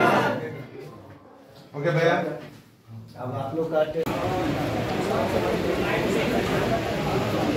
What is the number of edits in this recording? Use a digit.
1